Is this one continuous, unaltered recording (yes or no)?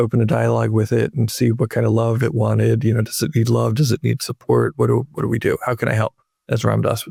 yes